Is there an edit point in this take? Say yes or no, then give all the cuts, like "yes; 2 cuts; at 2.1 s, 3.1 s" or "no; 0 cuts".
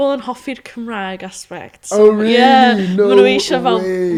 no; 0 cuts